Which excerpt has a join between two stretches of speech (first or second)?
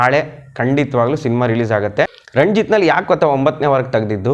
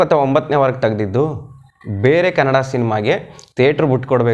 first